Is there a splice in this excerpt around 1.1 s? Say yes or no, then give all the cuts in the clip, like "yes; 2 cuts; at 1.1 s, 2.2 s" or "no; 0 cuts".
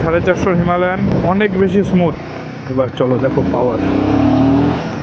yes; 2 cuts; at 1.1 s, 2.2 s